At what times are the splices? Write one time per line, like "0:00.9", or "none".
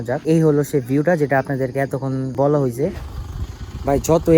0:03.0